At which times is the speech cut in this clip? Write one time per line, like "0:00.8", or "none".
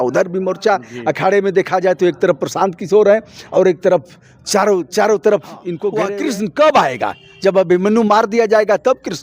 0:06.1